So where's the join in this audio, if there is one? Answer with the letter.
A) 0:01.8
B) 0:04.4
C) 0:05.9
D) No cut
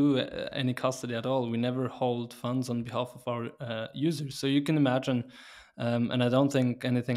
D